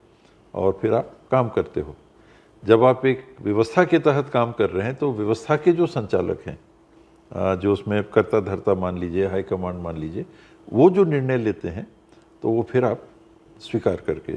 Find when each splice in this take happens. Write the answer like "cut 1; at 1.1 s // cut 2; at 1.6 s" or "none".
none